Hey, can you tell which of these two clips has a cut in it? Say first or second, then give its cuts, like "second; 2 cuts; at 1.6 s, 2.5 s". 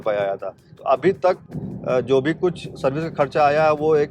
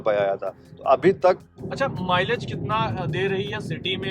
second; 1 cut; at 1.6 s